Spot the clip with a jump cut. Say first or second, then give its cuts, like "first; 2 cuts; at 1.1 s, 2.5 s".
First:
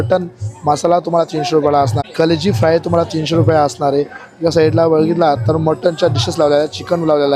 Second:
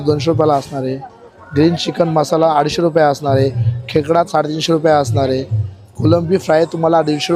first; 1 cut; at 2.0 s